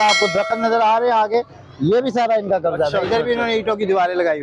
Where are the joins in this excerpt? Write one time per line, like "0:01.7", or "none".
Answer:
none